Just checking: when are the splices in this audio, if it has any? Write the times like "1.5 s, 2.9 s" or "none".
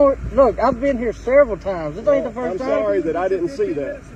none

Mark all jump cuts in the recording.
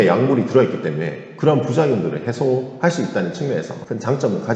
none

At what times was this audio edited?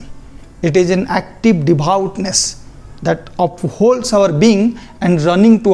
none

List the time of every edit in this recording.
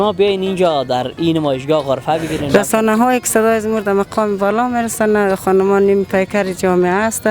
2.4 s

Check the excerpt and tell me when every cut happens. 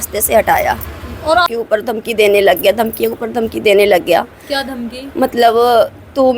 1.5 s

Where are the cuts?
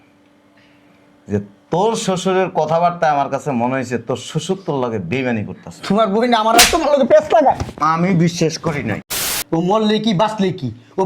9.1 s

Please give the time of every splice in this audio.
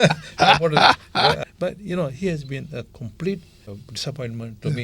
1.4 s, 3.7 s

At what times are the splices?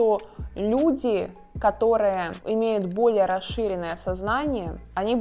2.3 s

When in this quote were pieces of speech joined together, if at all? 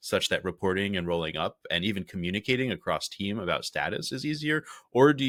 none

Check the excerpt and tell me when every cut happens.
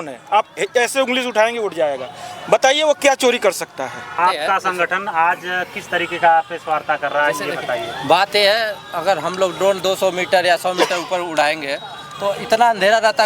4.2 s

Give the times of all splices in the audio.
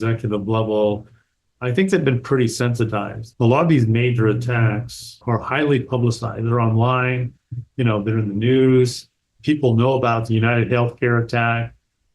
3.2 s

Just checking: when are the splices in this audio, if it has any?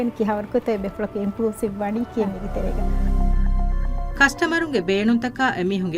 2.9 s, 4.1 s

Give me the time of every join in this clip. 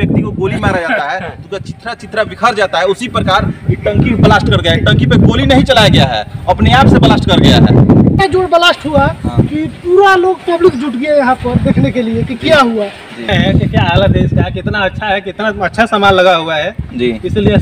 8.2 s, 13.3 s

